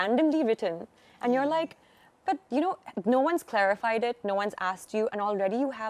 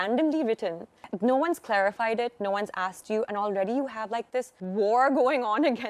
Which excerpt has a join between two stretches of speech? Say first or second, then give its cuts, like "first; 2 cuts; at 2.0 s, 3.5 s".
second; 2 cuts; at 1.0 s, 4.6 s